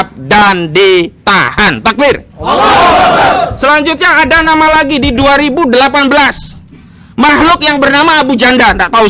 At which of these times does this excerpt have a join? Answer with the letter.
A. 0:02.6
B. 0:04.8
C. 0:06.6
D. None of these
D